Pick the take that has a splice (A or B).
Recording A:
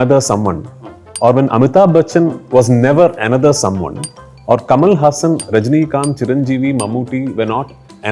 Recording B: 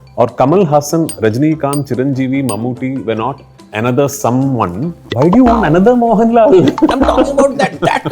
B